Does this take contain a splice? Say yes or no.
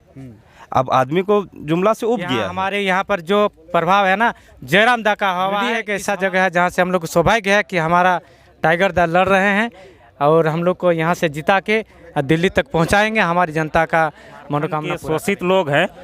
yes